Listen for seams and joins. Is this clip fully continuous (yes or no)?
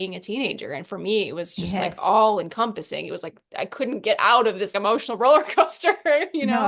yes